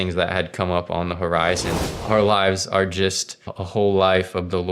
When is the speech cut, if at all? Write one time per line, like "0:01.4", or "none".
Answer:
0:01.8
0:03.6